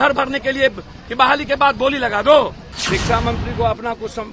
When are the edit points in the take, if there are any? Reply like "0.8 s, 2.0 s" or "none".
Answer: 2.7 s